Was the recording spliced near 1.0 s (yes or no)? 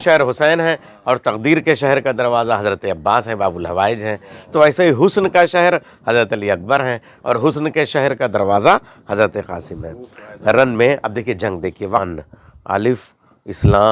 no